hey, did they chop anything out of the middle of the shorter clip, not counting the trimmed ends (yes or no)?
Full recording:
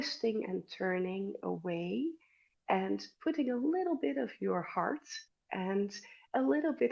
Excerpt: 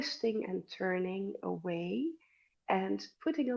no